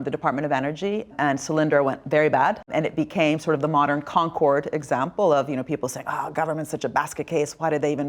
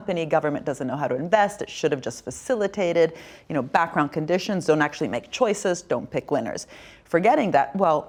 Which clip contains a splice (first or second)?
first